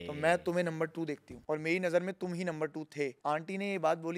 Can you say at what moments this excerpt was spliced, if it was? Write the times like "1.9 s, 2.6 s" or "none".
1.3 s, 3.2 s